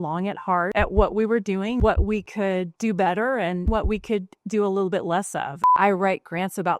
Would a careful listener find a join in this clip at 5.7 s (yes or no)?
yes